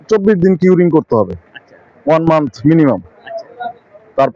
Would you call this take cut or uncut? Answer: uncut